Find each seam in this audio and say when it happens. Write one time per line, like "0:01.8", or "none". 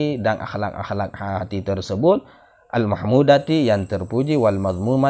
none